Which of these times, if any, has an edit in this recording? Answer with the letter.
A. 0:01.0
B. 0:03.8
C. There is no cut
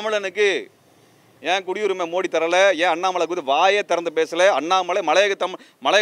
C